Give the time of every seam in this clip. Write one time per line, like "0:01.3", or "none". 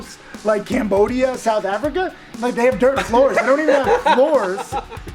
0:02.3